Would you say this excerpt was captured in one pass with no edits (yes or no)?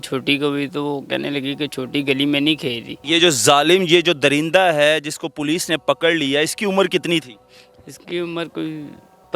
no